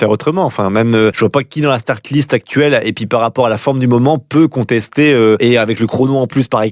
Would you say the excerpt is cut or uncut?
cut